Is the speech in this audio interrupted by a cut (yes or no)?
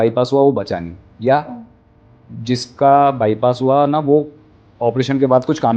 no